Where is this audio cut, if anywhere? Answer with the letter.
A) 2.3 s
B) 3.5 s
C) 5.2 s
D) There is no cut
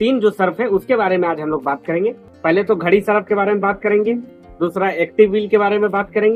A